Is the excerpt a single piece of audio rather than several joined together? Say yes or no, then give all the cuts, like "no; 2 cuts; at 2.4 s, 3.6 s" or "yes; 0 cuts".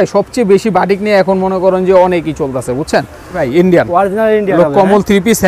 no; 1 cut; at 3.5 s